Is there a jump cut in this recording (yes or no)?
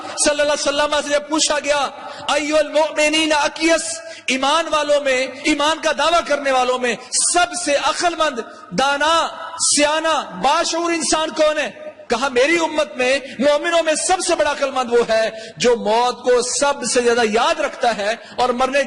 yes